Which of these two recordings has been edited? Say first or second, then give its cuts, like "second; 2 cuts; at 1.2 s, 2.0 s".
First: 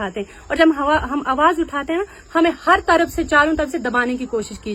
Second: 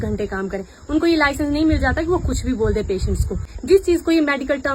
second; 1 cut; at 3.5 s